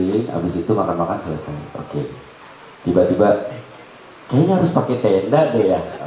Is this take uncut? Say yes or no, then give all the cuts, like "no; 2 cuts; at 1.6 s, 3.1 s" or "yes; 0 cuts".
yes; 0 cuts